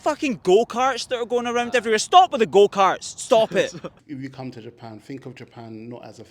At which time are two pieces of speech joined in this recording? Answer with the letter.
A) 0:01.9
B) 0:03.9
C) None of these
B